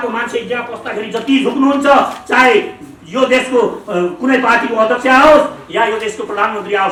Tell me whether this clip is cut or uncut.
uncut